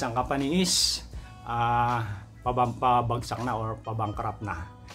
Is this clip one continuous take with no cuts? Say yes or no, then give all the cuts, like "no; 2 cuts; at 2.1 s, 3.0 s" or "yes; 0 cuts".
yes; 0 cuts